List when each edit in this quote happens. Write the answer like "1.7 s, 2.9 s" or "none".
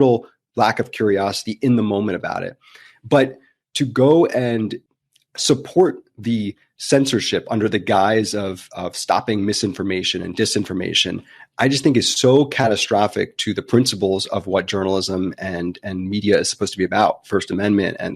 4.9 s